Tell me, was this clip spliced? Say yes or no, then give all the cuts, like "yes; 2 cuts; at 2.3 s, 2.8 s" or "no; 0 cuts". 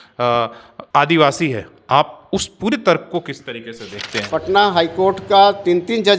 yes; 1 cut; at 4.3 s